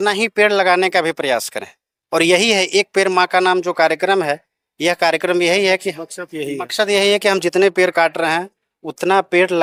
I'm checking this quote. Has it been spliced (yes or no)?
no